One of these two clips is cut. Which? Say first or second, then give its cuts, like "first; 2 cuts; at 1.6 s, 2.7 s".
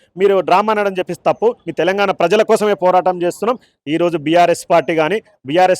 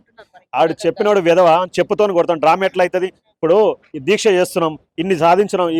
first; 1 cut; at 3.7 s